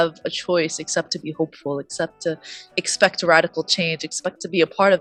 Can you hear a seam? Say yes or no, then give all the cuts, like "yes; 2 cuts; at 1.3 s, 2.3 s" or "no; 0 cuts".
no; 0 cuts